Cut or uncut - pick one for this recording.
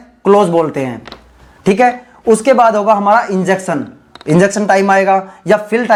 uncut